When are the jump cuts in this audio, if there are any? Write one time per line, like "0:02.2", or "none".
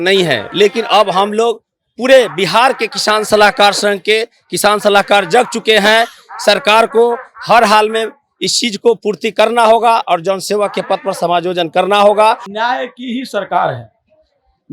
0:12.5